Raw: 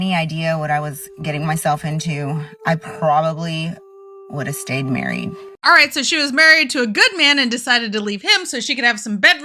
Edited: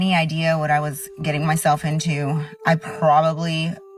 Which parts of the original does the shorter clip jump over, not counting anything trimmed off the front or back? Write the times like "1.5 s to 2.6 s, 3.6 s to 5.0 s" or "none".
none